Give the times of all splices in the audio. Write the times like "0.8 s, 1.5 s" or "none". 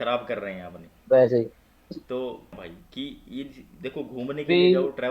2.7 s